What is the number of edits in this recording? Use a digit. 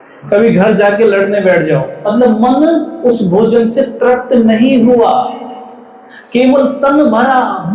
1